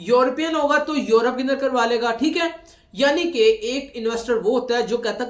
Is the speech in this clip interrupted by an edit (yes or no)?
no